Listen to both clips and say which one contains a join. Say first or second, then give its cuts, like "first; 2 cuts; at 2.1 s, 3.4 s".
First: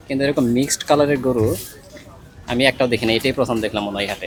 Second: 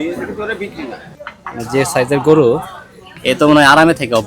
second; 1 cut; at 1.3 s